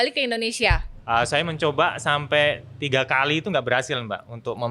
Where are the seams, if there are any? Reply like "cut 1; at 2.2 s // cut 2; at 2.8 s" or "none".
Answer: cut 1; at 0.9 s